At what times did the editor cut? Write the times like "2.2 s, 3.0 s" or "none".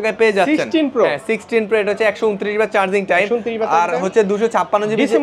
none